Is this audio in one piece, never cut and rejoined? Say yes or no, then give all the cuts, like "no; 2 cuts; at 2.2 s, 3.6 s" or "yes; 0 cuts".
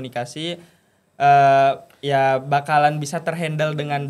yes; 0 cuts